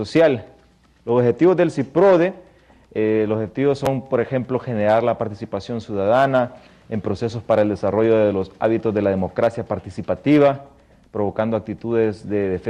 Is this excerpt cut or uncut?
cut